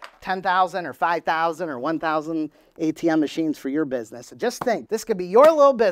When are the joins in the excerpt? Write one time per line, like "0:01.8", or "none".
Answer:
0:04.8